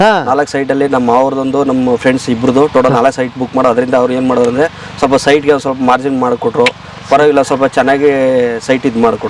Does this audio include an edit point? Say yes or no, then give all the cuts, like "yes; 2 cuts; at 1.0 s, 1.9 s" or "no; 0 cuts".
no; 0 cuts